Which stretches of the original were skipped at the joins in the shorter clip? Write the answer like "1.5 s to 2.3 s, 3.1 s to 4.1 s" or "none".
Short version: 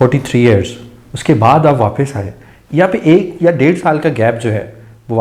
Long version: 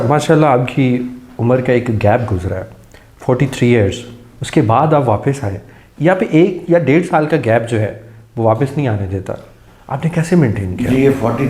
none